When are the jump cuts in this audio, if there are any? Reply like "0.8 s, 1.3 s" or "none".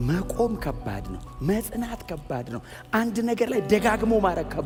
none